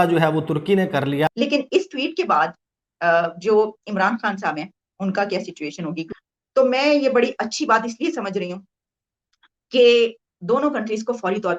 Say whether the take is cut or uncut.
cut